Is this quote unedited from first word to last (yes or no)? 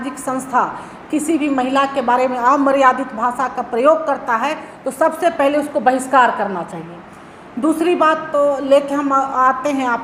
yes